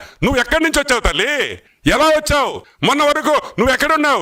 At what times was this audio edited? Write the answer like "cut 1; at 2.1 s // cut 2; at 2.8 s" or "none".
cut 1; at 1.6 s // cut 2; at 2.6 s

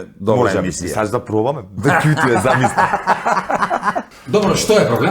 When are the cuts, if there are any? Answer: cut 1; at 4.1 s

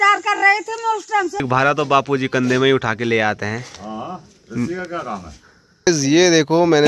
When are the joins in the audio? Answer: cut 1; at 1.4 s // cut 2; at 5.9 s

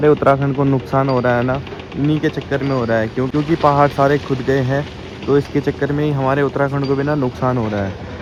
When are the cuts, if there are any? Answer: none

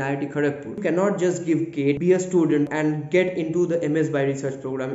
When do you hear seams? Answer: cut 1; at 0.8 s // cut 2; at 2.0 s // cut 3; at 2.7 s

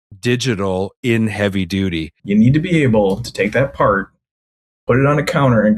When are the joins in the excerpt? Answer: cut 1; at 2.1 s

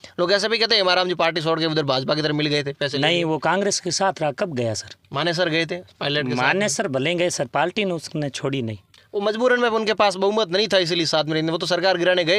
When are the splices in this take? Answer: none

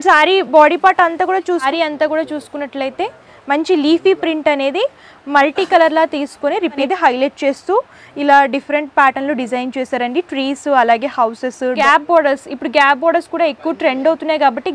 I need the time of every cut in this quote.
cut 1; at 1.6 s // cut 2; at 6.8 s // cut 3; at 11.8 s

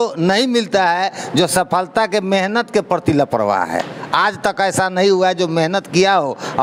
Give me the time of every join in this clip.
none

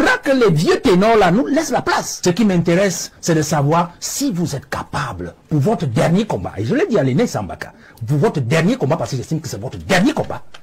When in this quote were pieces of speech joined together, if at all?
cut 1; at 2.1 s

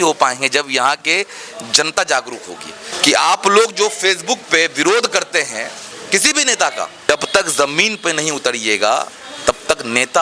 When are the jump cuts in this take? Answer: cut 1; at 2.9 s // cut 2; at 7.0 s

